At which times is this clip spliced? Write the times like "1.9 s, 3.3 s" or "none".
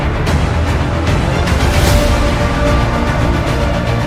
none